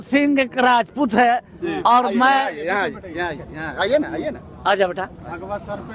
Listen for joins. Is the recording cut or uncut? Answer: uncut